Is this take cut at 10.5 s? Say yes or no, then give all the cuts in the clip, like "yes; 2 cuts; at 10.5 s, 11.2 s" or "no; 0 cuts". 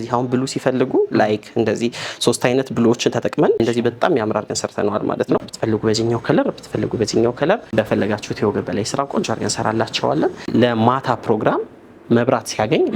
yes; 4 cuts; at 3.6 s, 5.4 s, 7.7 s, 10.5 s